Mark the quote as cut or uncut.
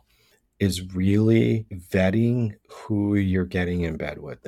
cut